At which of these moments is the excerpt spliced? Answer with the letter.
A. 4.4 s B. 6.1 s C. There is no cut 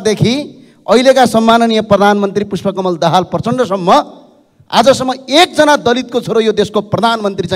C